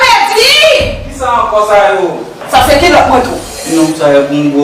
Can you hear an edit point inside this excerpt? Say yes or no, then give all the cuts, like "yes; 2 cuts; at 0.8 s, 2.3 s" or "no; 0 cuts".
yes; 1 cut; at 2.3 s